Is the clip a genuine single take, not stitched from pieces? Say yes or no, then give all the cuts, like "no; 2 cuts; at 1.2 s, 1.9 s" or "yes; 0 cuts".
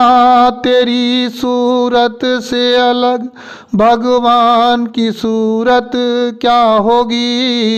yes; 0 cuts